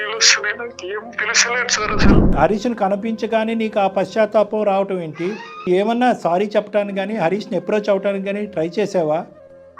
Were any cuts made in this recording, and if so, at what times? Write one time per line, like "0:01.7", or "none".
0:02.3
0:05.6